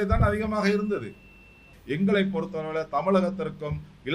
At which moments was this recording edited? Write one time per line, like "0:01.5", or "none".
0:01.7